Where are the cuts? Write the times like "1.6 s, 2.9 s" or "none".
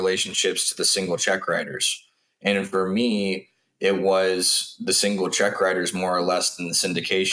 none

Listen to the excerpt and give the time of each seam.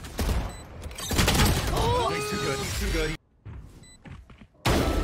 3.2 s

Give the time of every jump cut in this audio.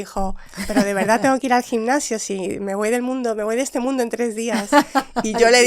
none

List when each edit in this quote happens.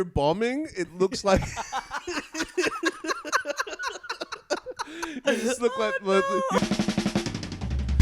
6.6 s

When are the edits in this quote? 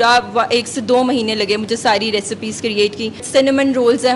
3.2 s

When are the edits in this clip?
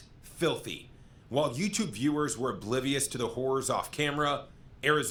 none

